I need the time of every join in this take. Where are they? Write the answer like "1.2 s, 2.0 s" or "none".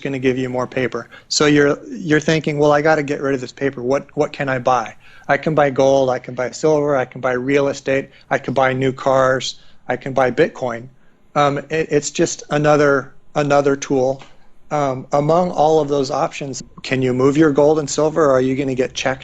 16.6 s